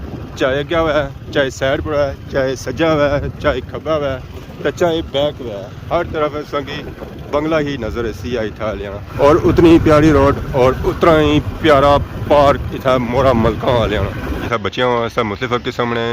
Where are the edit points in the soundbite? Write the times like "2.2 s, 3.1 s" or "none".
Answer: 9.0 s, 14.4 s